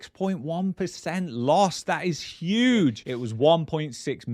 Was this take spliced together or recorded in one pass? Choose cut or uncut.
cut